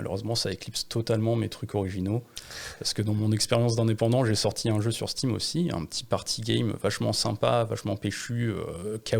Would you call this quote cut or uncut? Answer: uncut